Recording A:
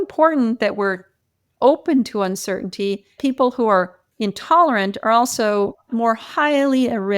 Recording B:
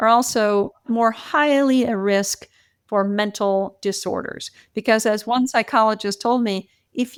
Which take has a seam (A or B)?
A